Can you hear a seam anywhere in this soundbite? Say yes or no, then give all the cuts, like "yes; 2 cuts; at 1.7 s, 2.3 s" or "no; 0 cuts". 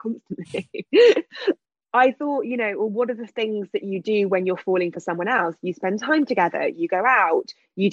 yes; 1 cut; at 1.6 s